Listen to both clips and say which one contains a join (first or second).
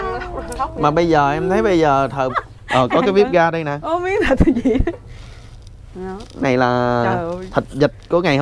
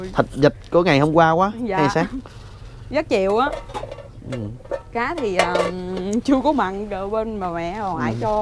first